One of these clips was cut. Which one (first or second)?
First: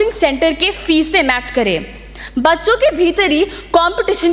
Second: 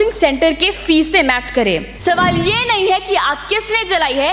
second